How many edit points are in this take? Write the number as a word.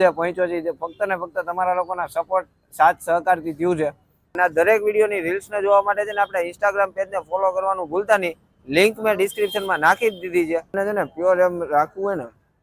two